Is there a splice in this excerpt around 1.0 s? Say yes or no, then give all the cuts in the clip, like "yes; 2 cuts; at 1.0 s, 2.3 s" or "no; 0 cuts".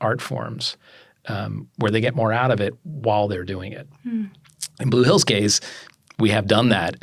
no; 0 cuts